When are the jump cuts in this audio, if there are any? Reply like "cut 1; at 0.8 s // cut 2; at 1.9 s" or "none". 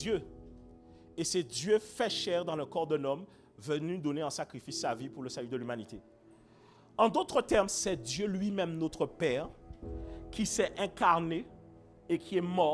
none